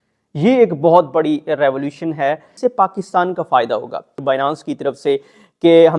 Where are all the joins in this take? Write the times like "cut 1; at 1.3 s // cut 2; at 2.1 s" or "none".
cut 1; at 2.5 s // cut 2; at 4.2 s